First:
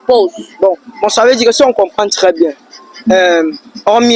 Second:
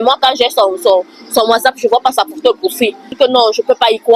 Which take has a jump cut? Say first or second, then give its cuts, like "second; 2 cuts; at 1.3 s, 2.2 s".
second; 1 cut; at 3.1 s